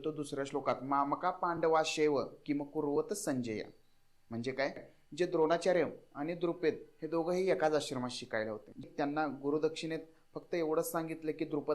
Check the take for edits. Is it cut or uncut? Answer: cut